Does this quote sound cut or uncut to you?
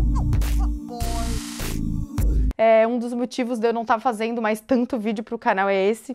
cut